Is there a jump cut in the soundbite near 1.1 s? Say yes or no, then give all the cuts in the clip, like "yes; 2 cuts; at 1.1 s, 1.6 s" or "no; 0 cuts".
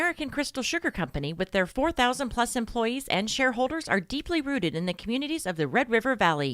yes; 1 cut; at 1.1 s